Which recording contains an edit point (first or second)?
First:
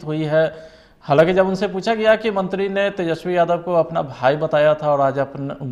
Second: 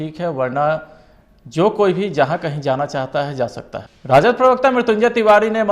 second